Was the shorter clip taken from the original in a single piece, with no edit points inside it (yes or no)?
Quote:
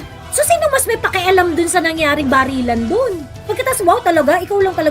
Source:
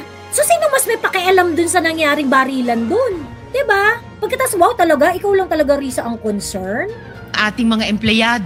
no